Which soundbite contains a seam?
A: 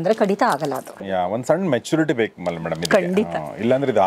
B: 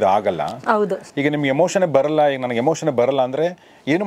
A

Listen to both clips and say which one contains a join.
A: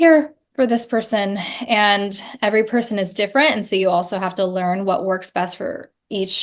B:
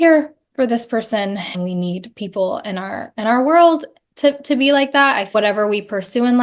B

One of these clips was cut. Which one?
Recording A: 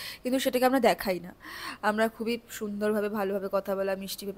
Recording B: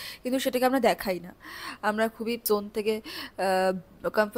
B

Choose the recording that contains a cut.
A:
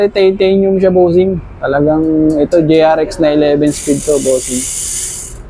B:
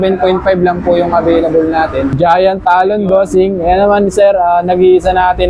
B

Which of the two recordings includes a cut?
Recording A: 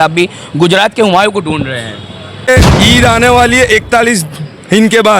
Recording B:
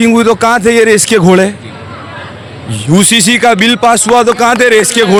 A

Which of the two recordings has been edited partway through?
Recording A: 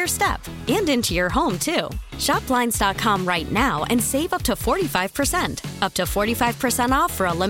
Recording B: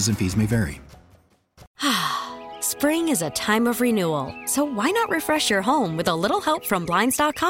B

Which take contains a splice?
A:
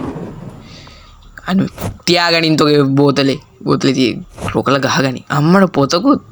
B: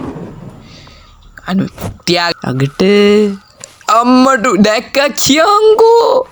B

